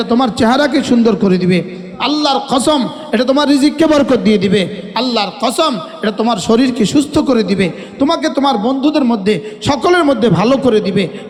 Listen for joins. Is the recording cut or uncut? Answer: uncut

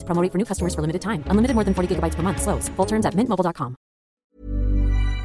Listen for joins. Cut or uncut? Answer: cut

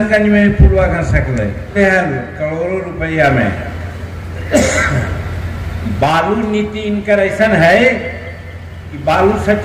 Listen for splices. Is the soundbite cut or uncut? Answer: cut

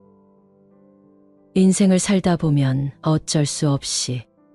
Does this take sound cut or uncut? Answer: cut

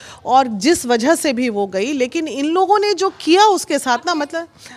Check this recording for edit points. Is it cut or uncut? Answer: uncut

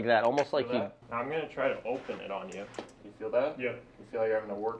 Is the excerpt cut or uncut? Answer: cut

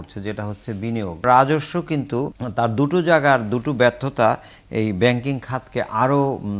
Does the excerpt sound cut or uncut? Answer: cut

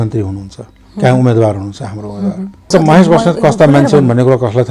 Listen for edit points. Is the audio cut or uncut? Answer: cut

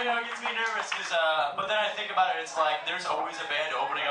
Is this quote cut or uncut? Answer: uncut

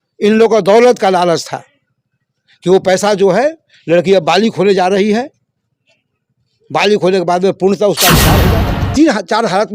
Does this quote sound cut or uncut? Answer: cut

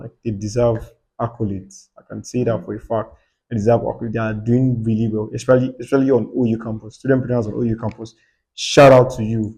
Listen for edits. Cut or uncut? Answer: uncut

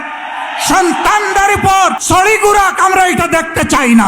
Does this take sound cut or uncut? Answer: cut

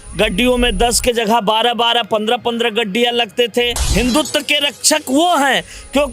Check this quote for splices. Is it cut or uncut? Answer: cut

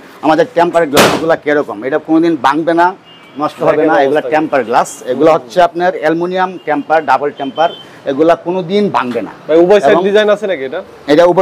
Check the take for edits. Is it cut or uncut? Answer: uncut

